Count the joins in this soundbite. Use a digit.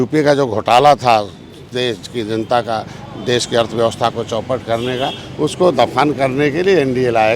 0